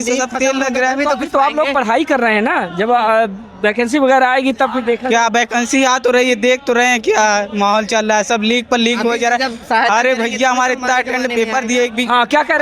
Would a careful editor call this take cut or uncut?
uncut